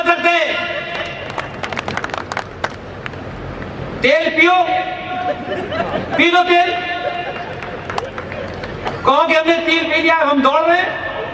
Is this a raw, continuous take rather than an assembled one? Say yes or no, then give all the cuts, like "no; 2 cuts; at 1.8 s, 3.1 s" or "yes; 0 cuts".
yes; 0 cuts